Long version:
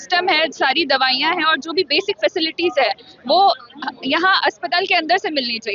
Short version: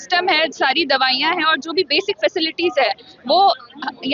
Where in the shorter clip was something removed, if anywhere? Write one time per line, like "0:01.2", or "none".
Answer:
none